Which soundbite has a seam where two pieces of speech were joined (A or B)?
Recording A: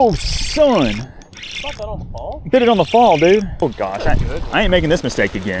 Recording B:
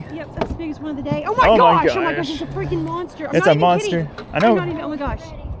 A